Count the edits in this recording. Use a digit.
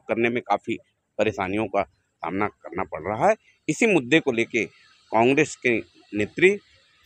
0